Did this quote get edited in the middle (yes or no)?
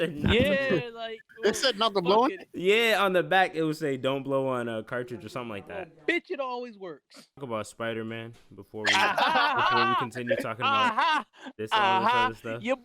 yes